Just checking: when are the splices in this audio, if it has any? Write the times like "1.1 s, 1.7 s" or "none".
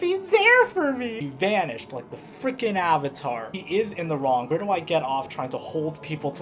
1.1 s, 3.5 s, 4.5 s